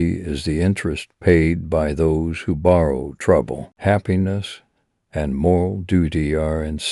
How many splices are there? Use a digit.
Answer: 0